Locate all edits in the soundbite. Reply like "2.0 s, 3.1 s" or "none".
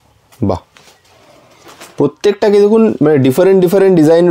none